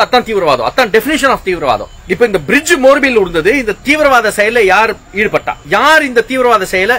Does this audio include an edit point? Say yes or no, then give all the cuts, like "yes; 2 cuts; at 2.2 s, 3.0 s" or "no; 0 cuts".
yes; 2 cuts; at 2.0 s, 5.6 s